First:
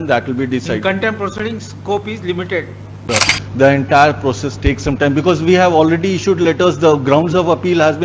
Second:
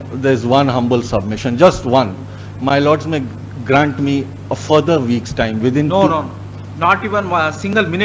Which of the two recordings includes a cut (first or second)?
first